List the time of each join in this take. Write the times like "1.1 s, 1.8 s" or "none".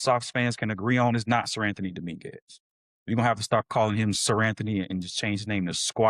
none